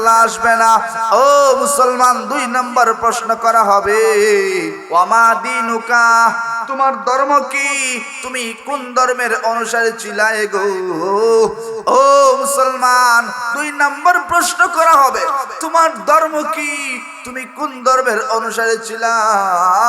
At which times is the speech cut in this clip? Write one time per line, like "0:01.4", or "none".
0:04.8